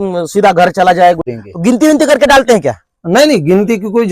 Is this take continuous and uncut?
no; 1 cut; at 1.3 s

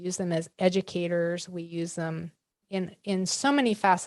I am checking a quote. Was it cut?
no; 0 cuts

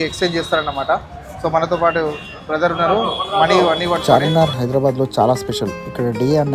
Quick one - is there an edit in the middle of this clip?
yes; 1 cut; at 4.0 s

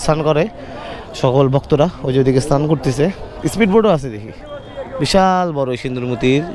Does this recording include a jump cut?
no; 0 cuts

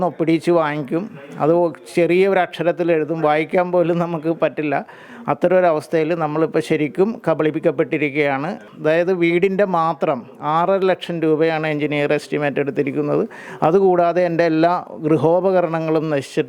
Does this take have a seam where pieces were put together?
yes; 1 cut; at 8.7 s

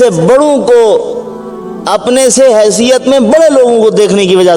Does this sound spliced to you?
no; 0 cuts

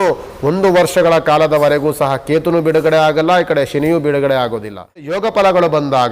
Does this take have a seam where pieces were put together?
yes; 1 cut; at 5.2 s

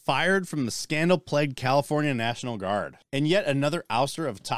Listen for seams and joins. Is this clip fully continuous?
no; 1 cut; at 3.0 s

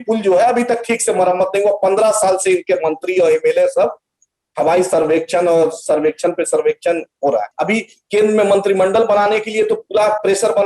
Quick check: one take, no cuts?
no; 1 cut; at 7.5 s

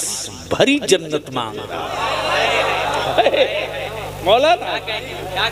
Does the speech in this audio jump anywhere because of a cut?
no; 0 cuts

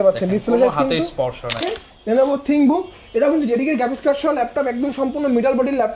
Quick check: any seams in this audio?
yes; 1 cut; at 1.6 s

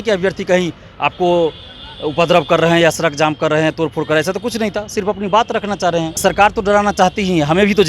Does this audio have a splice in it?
yes; 1 cut; at 6.2 s

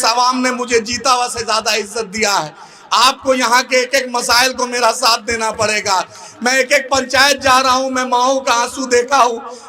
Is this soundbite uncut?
yes; 0 cuts

